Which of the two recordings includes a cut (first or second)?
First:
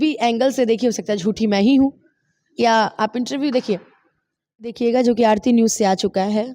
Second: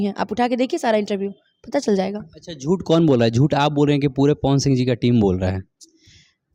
first